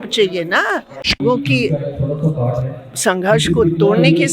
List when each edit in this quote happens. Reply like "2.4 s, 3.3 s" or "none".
1.2 s